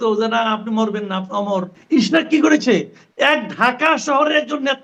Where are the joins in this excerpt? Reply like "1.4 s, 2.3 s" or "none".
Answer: 1.8 s